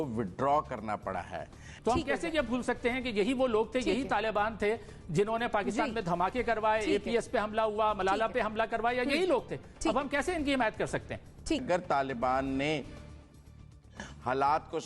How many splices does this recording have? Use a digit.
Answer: 2